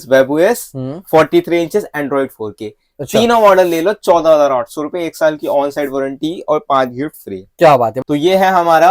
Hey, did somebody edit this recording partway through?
yes; 1 cut; at 7.9 s

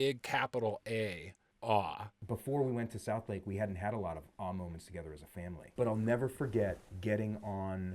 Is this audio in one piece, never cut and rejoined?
no; 3 cuts; at 2.2 s, 5.7 s, 6.9 s

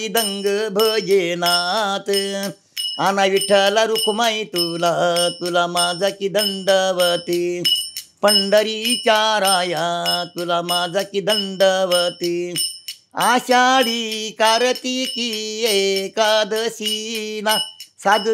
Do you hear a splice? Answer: no; 0 cuts

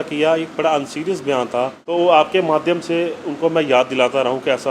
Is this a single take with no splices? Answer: no; 1 cut; at 1.8 s

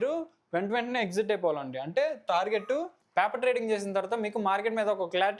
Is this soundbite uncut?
no; 1 cut; at 3.0 s

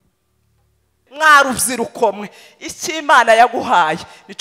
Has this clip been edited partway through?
yes; 1 cut; at 1.0 s

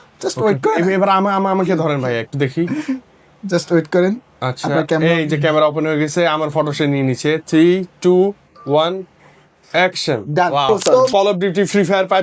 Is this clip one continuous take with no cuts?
no; 1 cut; at 11.1 s

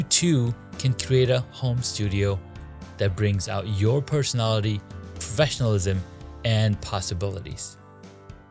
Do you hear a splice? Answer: no; 0 cuts

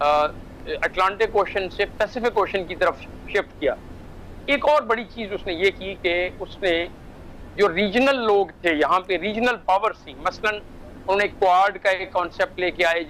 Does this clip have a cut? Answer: no; 0 cuts

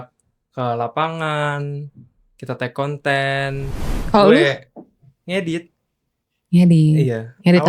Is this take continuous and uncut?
no; 1 cut; at 3.8 s

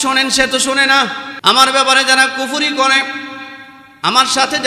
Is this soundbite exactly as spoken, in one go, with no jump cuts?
no; 1 cut; at 1.3 s

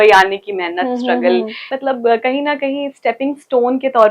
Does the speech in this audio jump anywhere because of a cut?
yes; 1 cut; at 1.6 s

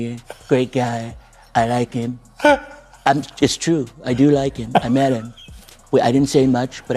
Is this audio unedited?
yes; 0 cuts

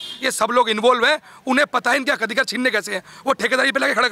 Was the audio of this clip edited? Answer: no; 0 cuts

